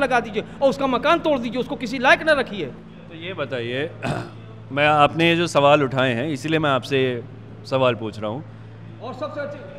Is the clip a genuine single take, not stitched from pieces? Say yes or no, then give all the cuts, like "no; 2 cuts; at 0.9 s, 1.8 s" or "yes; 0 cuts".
yes; 0 cuts